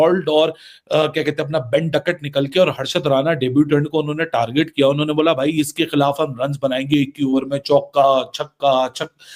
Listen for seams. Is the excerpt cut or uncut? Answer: uncut